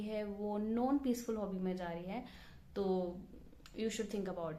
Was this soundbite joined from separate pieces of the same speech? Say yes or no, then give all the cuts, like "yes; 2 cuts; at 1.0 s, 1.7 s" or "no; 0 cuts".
no; 0 cuts